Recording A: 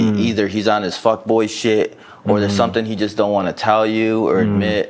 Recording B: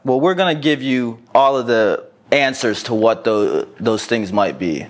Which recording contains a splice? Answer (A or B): B